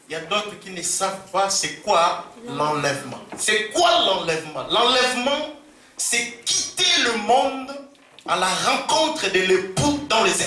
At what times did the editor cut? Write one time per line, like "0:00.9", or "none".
none